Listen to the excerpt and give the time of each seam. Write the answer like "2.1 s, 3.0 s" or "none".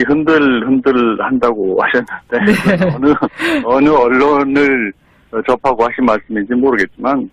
4.7 s